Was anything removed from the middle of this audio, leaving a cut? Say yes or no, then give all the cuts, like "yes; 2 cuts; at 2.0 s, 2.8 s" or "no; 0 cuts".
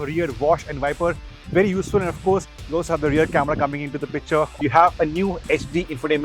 yes; 1 cut; at 4.5 s